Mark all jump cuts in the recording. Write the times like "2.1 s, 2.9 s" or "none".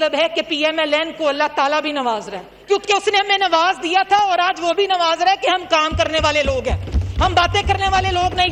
none